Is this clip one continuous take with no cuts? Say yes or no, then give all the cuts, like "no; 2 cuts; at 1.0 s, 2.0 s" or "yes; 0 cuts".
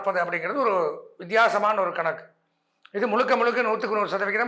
yes; 0 cuts